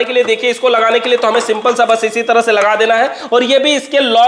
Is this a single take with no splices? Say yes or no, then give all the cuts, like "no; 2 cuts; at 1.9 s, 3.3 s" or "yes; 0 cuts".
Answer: yes; 0 cuts